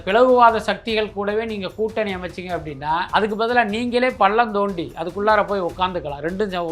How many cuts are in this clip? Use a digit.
1